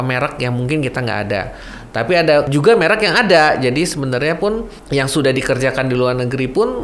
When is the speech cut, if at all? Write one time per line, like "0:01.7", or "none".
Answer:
0:02.5
0:04.8